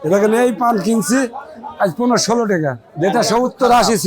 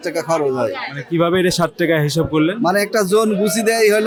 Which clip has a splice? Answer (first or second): first